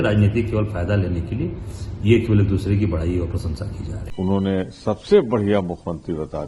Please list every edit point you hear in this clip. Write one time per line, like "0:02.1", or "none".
0:03.9